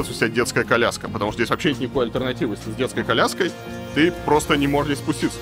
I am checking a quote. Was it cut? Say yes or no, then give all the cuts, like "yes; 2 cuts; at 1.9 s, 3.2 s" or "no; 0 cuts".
no; 0 cuts